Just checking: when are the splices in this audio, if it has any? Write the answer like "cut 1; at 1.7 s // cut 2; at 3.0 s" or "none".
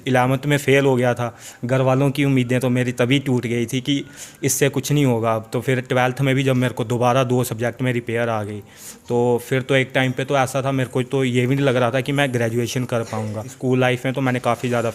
cut 1; at 13.5 s